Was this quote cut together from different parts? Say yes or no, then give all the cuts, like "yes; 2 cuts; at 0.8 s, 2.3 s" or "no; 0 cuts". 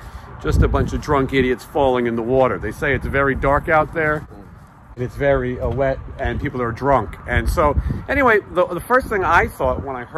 yes; 1 cut; at 5.0 s